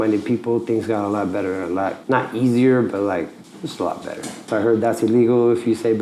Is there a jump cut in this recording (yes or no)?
yes